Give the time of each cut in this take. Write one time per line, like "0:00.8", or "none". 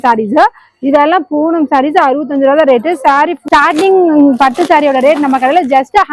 0:03.5